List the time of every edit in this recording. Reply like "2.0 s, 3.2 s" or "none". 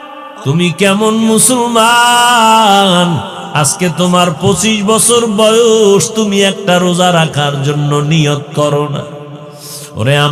none